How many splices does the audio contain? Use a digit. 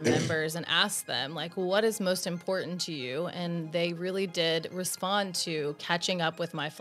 0